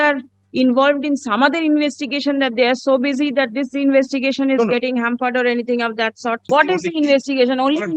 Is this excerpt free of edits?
no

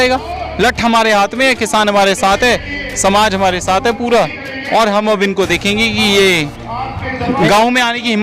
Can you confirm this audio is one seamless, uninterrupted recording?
yes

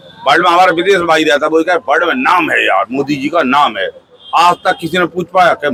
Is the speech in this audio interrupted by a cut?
no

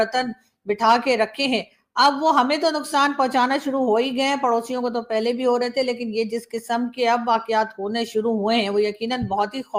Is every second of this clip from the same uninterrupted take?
yes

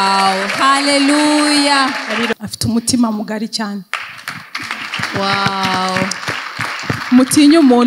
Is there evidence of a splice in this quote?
yes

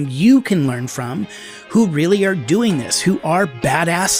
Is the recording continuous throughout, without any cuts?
yes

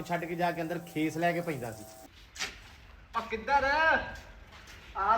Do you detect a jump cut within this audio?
yes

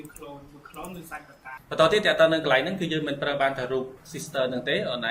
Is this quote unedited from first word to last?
no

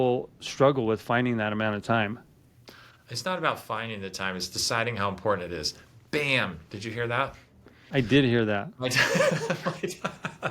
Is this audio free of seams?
yes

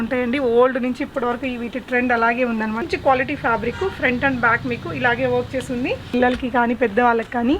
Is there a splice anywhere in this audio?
yes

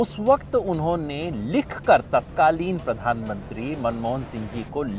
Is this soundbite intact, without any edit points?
yes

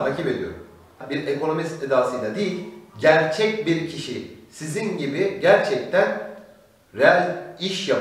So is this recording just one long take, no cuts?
no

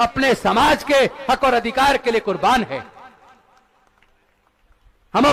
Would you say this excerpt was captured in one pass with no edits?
yes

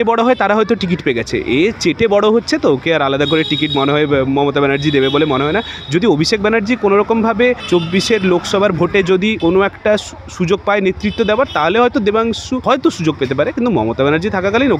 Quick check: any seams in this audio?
yes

